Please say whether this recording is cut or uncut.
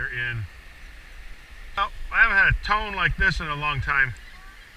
cut